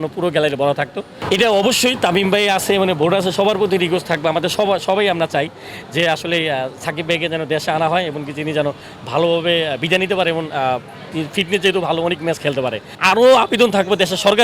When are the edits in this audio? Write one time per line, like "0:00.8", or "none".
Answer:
0:01.2
0:12.9